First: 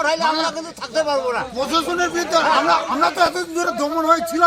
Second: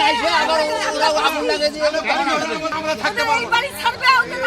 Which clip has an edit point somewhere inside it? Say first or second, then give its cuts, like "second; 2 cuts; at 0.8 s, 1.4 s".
second; 1 cut; at 2.7 s